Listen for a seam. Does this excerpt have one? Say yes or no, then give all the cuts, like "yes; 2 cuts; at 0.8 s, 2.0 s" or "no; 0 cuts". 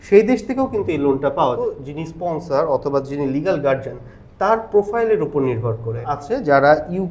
yes; 2 cuts; at 1.6 s, 6.1 s